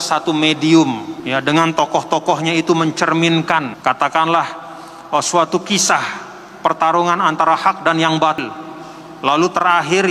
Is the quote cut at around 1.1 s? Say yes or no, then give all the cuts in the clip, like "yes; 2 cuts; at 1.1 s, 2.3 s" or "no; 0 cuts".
yes; 3 cuts; at 1.1 s, 3.7 s, 8.4 s